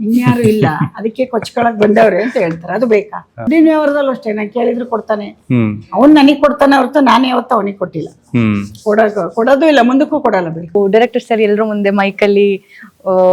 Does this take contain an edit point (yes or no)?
yes